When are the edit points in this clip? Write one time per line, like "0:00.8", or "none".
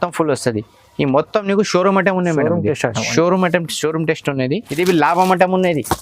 0:04.7